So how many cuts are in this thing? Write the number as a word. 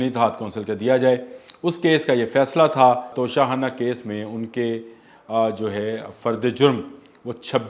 one